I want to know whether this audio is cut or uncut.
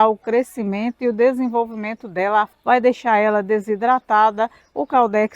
cut